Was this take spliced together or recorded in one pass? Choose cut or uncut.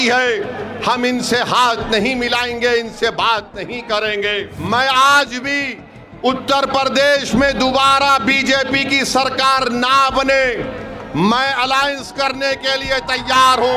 cut